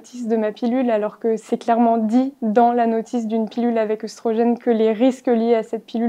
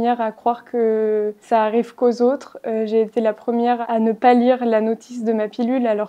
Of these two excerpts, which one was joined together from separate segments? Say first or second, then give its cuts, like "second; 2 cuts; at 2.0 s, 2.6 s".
second; 2 cuts; at 1.4 s, 3.8 s